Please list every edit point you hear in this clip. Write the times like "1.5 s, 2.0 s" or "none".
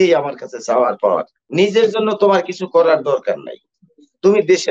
1.4 s